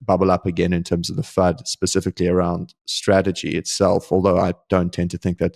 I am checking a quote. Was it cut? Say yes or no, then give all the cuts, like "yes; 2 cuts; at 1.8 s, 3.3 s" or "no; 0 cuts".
no; 0 cuts